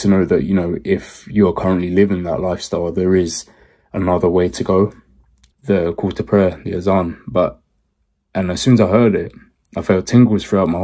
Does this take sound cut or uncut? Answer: cut